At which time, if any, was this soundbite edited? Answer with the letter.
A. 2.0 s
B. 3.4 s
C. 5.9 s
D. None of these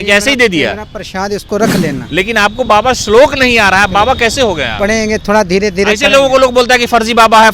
A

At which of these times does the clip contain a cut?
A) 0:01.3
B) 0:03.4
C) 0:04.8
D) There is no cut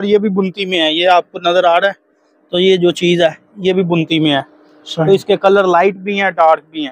D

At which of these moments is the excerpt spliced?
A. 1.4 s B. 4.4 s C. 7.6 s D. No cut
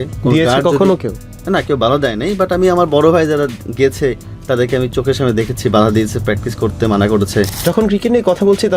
C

